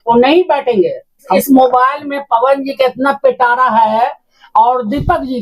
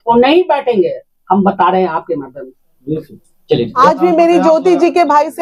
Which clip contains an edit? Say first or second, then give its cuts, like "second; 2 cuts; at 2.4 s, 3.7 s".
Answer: first; 1 cut; at 1.2 s